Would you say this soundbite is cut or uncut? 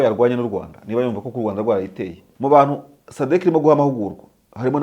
cut